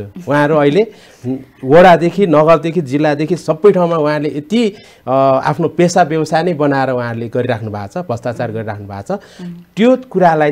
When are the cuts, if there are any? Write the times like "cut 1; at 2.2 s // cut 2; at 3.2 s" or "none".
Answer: none